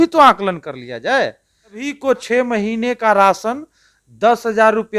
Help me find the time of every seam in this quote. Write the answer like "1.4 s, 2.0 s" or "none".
1.9 s